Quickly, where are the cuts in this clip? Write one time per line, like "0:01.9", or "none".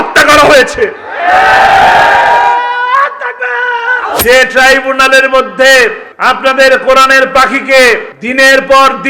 0:04.2
0:06.1
0:08.2